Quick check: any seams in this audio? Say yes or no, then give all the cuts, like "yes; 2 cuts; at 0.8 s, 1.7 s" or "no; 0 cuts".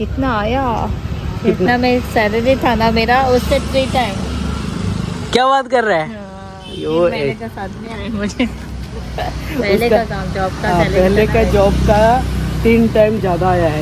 no; 0 cuts